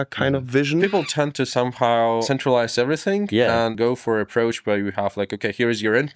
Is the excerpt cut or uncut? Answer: cut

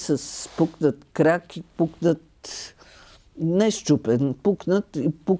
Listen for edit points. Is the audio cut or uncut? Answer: uncut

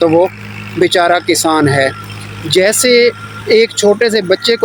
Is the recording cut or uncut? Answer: uncut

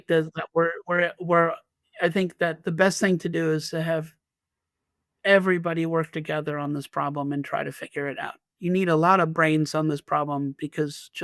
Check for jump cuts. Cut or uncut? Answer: uncut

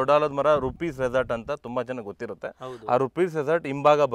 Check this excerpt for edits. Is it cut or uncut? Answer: uncut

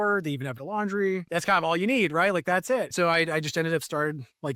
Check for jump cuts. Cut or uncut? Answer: cut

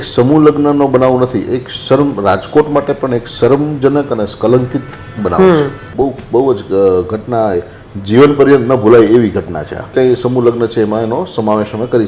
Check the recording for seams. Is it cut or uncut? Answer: cut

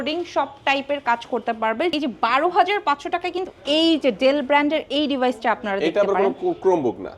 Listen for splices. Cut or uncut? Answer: cut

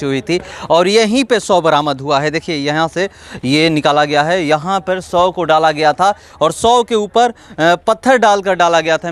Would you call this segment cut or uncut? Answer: uncut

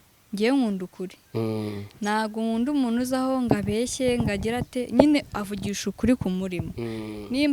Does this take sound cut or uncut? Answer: uncut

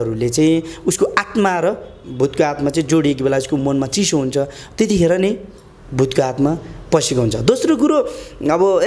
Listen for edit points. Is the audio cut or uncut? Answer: uncut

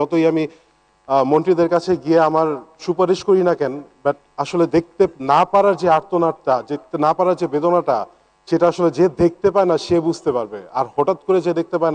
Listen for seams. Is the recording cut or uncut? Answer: uncut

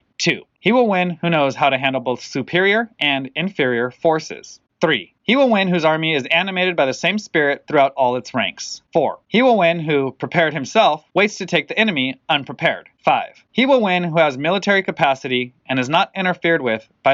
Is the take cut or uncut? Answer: uncut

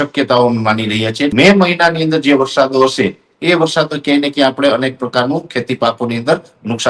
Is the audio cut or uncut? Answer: cut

